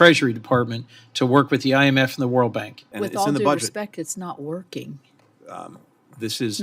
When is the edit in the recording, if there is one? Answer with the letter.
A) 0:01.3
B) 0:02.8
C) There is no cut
B